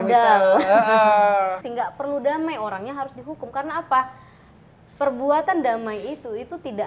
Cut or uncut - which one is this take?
cut